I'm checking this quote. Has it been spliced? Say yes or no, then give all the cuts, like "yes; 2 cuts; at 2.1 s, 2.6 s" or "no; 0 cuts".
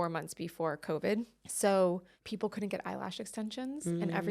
yes; 2 cuts; at 1.4 s, 2.1 s